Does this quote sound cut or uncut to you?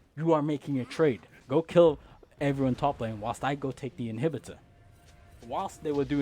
cut